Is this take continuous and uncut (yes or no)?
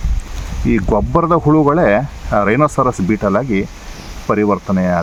yes